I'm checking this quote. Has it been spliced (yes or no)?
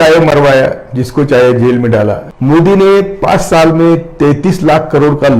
yes